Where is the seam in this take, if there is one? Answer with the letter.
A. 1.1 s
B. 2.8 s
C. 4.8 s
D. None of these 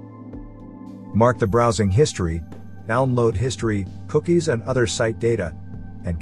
A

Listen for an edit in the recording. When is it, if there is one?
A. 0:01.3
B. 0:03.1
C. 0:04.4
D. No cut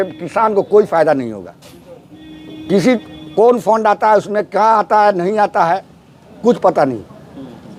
D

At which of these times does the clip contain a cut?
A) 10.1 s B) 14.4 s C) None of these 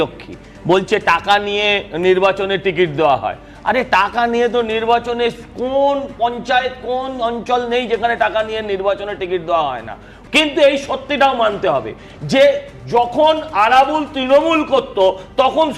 A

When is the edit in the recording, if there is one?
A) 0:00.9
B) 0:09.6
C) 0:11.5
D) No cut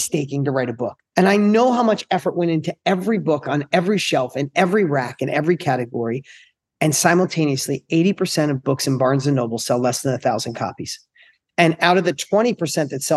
A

